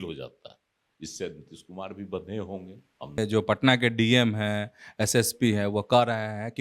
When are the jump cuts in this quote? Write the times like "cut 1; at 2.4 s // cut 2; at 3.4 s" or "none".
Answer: cut 1; at 3.2 s